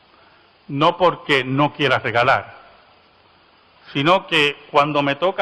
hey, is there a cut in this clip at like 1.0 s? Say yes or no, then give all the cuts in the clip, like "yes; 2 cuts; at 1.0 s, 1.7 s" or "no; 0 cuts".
no; 1 cut; at 2.4 s